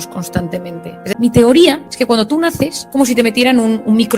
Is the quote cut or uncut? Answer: cut